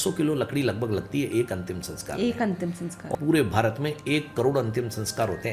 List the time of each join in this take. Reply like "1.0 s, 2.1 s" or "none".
3.1 s